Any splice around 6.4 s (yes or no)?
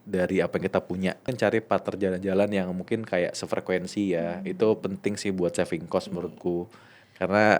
no